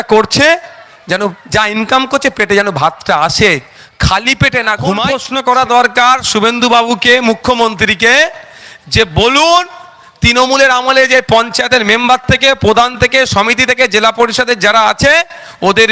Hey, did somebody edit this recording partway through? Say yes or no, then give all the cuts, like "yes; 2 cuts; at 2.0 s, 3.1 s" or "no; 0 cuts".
yes; 1 cut; at 5.2 s